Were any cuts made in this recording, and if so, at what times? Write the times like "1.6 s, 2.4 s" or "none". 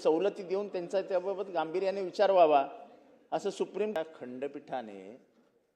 4.0 s